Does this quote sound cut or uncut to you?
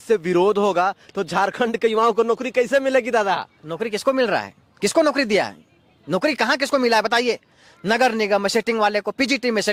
uncut